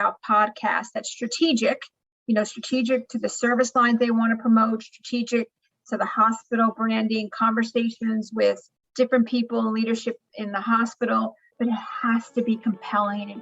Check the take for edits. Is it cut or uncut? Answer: cut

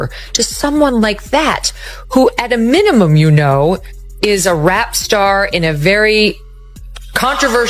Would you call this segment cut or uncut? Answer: uncut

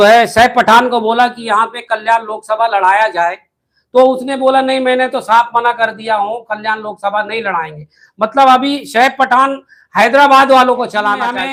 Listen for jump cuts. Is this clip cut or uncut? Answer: uncut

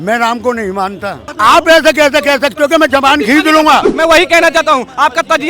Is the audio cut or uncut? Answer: cut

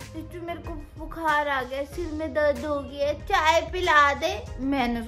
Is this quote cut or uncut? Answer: uncut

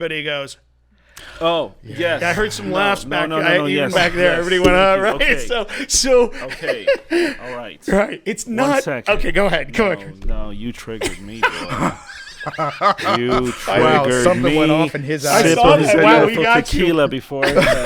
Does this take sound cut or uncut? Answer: uncut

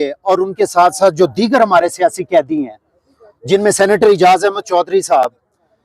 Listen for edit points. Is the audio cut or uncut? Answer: uncut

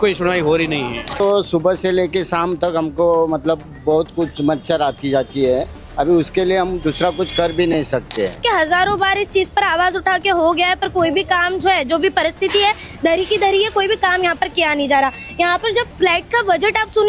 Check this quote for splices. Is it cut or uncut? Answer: cut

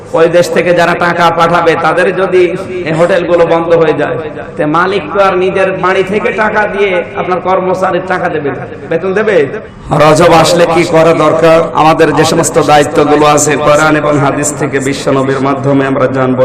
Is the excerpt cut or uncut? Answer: cut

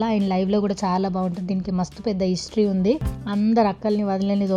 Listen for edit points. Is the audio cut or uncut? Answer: cut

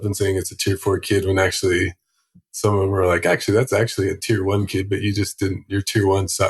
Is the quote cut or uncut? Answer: uncut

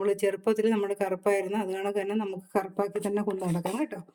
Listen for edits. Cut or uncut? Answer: uncut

